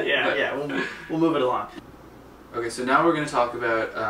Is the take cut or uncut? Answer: cut